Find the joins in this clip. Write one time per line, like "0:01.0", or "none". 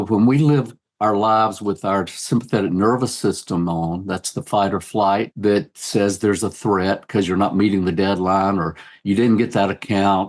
0:05.3